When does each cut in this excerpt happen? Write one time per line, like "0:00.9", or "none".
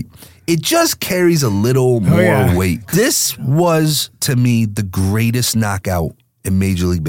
0:02.8